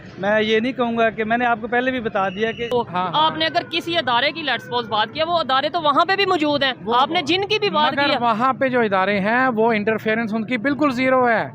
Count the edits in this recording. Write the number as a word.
one